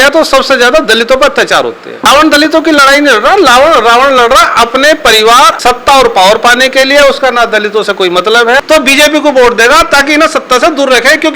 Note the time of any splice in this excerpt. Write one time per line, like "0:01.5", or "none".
0:01.9
0:05.5
0:08.6